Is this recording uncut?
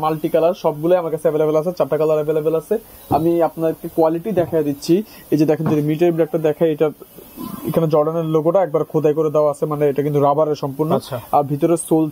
yes; 0 cuts

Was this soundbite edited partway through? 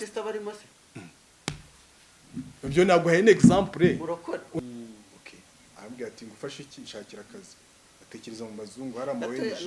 yes; 1 cut; at 4.6 s

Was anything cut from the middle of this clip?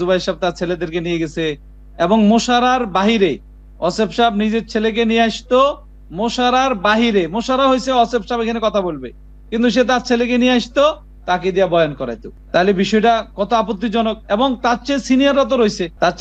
no; 0 cuts

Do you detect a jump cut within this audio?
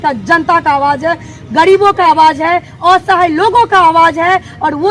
no; 0 cuts

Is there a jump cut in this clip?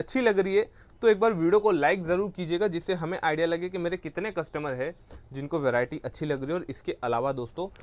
no; 0 cuts

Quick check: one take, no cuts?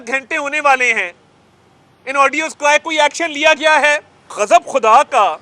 no; 1 cut; at 4.2 s

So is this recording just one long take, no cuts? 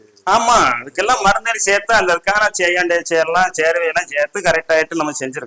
yes; 0 cuts

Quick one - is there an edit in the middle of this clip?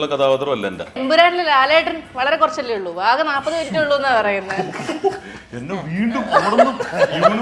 yes; 1 cut; at 1.0 s

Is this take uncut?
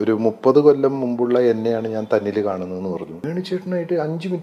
no; 1 cut; at 3.1 s

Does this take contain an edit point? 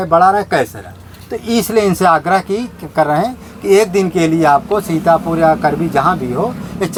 no; 0 cuts

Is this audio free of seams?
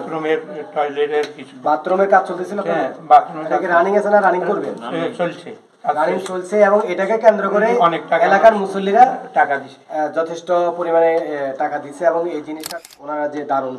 no; 1 cut; at 12.6 s

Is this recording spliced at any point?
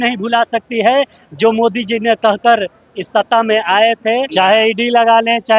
yes; 1 cut; at 4.3 s

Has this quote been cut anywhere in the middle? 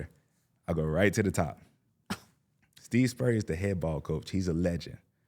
yes; 1 cut; at 2.8 s

